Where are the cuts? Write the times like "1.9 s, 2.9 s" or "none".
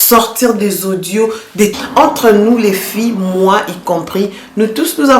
1.7 s